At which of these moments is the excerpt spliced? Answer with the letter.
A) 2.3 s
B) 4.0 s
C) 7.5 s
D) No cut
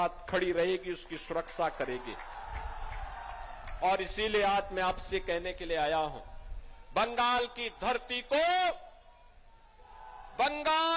D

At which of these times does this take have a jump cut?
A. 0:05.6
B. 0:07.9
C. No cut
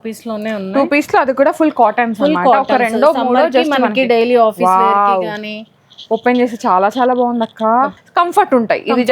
B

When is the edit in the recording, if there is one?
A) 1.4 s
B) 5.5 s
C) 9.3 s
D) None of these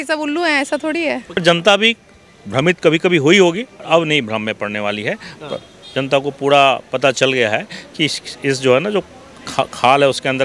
A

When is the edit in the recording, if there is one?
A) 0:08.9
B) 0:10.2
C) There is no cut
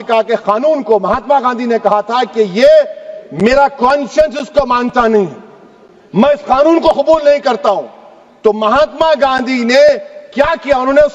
C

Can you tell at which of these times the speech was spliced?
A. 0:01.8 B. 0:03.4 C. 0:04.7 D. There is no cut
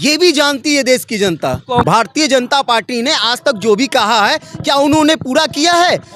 A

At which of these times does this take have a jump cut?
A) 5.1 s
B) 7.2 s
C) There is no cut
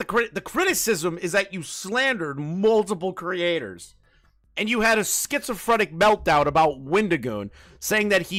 C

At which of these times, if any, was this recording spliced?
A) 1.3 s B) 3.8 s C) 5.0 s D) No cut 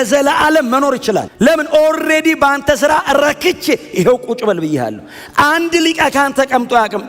A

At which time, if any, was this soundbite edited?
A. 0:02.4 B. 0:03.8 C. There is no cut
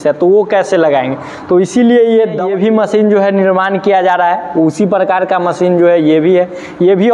A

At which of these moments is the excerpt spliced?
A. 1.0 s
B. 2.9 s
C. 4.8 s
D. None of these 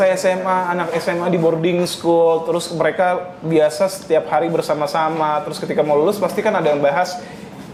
D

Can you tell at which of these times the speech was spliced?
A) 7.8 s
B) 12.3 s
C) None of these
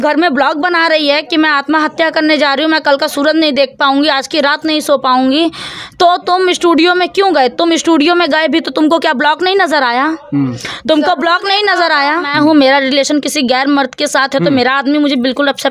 B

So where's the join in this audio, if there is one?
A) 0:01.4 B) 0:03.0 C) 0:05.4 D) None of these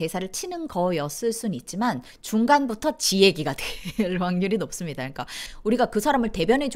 C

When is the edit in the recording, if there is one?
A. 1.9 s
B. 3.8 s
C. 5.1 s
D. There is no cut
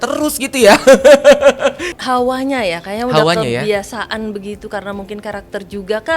A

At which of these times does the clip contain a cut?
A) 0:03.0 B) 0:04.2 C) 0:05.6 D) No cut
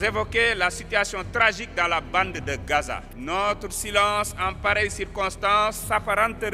A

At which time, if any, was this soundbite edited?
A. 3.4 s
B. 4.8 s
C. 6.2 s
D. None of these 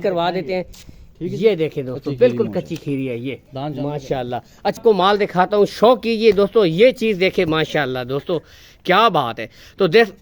B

